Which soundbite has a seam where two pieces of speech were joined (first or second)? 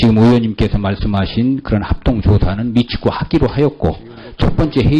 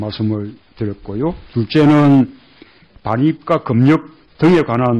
second